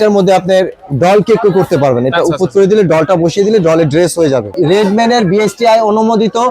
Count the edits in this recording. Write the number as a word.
one